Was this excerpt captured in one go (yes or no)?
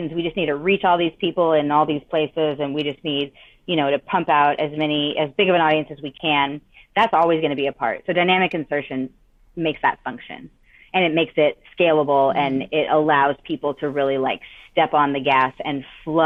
yes